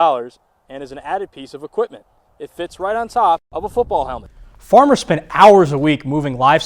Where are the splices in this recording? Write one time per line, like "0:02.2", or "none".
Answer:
0:04.2